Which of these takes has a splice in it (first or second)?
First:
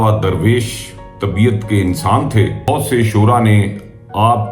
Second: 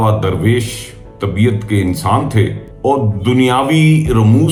first